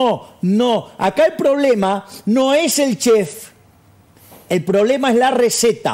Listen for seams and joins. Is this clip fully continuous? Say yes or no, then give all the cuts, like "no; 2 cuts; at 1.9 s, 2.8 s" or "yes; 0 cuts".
yes; 0 cuts